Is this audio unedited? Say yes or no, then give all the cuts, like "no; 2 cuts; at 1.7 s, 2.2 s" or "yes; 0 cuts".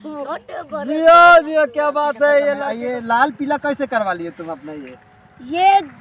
no; 1 cut; at 2.7 s